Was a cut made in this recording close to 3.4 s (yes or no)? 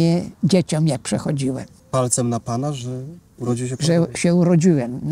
no